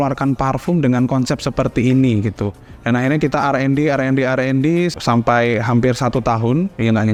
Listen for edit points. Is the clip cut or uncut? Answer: uncut